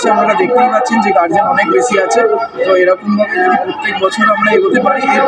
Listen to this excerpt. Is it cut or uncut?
uncut